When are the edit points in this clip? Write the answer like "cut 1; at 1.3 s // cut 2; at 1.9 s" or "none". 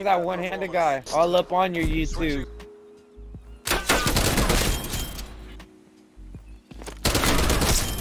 none